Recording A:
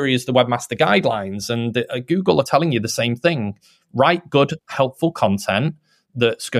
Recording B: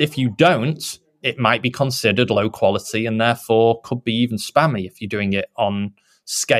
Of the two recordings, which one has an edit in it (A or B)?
A